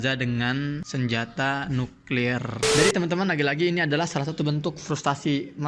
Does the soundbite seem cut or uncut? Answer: cut